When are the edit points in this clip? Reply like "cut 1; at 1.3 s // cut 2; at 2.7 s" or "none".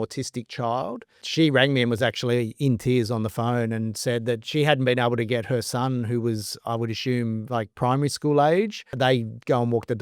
cut 1; at 1.2 s // cut 2; at 8.9 s